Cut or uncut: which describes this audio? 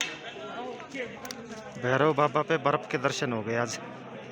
uncut